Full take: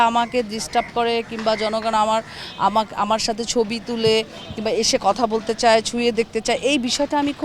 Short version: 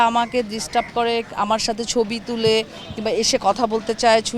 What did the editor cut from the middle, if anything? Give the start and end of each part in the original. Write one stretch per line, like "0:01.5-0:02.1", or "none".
0:01.3-0:02.9

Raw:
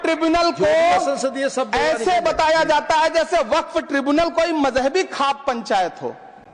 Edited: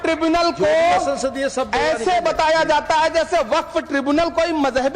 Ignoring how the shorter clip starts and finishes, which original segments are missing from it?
none

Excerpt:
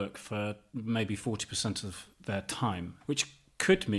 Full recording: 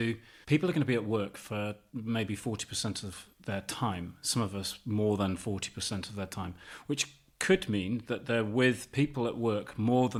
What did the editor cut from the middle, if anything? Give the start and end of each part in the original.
0:04.1-0:06.8

